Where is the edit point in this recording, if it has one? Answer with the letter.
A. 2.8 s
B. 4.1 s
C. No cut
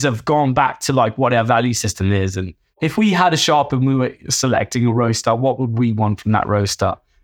A